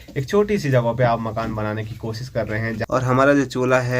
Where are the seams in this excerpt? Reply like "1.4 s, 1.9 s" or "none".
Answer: 2.8 s